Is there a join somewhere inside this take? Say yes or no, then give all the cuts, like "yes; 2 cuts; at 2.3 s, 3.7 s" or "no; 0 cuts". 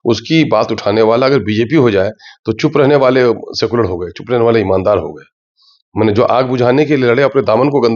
no; 0 cuts